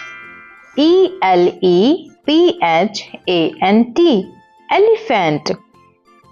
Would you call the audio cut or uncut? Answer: uncut